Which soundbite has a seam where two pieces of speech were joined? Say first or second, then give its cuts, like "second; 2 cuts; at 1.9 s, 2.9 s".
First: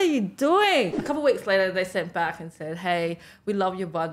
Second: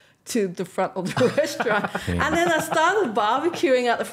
first; 1 cut; at 1.0 s